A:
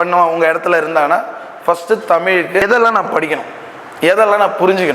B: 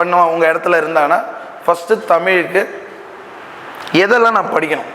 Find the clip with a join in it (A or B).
A